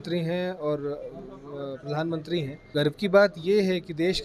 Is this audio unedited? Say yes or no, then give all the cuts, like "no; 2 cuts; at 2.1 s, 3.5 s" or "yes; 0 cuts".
no; 1 cut; at 2.6 s